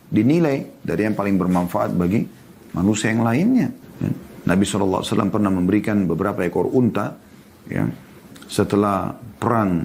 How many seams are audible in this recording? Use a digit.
1